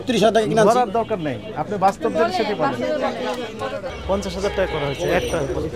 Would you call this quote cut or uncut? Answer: cut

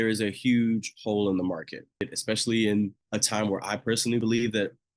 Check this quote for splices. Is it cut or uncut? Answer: cut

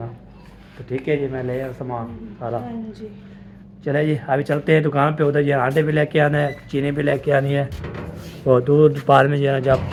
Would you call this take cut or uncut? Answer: uncut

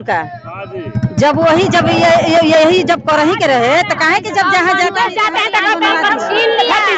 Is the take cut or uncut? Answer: uncut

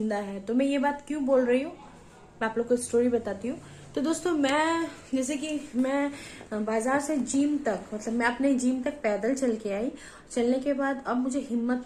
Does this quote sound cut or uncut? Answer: uncut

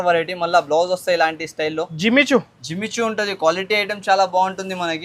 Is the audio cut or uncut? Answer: uncut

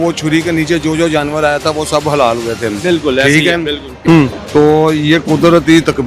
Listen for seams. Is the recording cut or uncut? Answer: cut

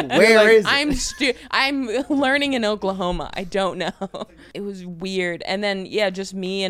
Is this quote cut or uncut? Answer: cut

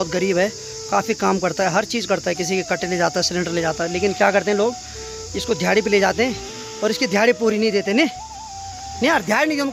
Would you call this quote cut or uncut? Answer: uncut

